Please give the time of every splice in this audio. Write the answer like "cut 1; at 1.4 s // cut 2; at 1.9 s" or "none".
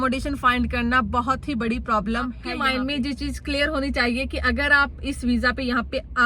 cut 1; at 2.5 s